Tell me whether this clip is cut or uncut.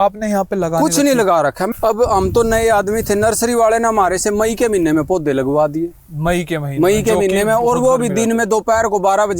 cut